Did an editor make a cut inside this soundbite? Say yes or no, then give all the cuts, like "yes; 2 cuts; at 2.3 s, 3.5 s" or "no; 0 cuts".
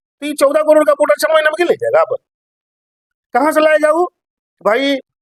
no; 0 cuts